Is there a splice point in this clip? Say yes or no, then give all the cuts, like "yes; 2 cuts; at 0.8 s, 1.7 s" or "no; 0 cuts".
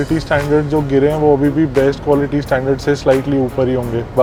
no; 0 cuts